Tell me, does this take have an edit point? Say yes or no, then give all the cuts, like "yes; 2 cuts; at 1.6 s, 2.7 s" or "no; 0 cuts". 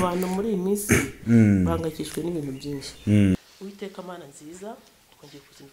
yes; 1 cut; at 3.4 s